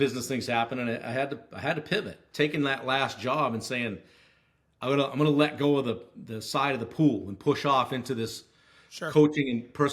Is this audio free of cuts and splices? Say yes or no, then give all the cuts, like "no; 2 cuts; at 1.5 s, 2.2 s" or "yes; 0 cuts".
no; 1 cut; at 2.2 s